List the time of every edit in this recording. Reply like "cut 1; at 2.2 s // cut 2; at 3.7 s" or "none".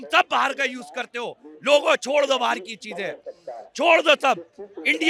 none